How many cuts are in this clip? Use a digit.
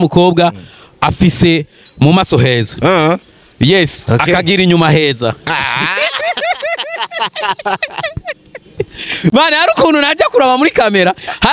0